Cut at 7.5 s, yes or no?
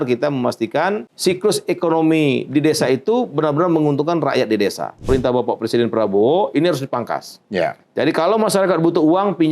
no